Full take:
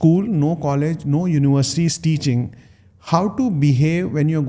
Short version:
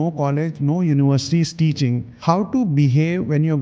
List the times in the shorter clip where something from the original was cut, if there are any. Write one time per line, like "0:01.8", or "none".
0:02.1